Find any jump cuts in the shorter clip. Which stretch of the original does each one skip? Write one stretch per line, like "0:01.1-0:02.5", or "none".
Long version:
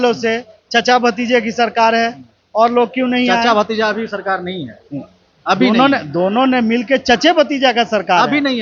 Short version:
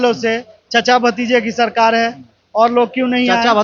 none